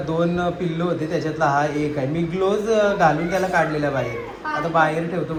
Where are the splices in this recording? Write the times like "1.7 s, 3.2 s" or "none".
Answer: none